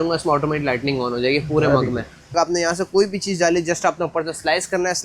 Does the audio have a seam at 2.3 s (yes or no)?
yes